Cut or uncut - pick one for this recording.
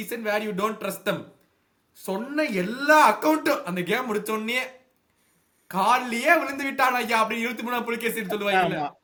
uncut